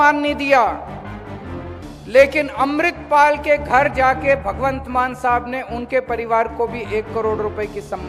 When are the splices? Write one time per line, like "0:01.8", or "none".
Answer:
none